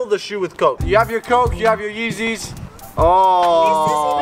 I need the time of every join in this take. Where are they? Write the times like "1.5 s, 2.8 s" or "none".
none